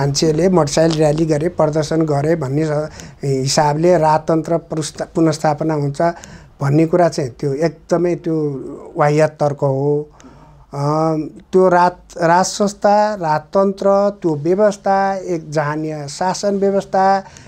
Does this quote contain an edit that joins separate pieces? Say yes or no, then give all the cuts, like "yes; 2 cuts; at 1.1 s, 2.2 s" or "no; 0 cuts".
no; 0 cuts